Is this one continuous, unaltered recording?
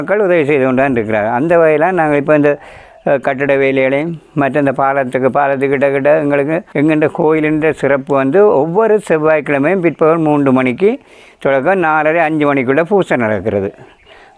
no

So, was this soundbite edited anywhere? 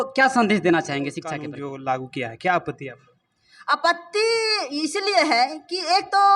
yes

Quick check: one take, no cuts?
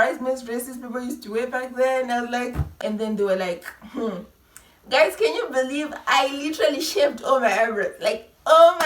no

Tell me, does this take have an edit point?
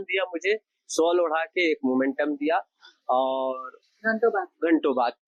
no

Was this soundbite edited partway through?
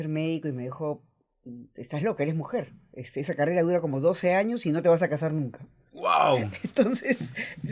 no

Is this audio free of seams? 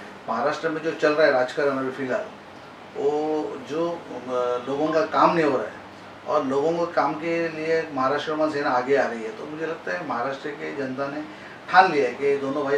yes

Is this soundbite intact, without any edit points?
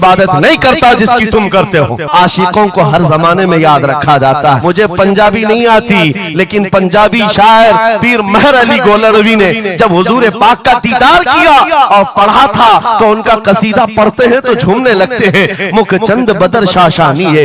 no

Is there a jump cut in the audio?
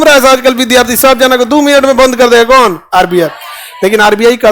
no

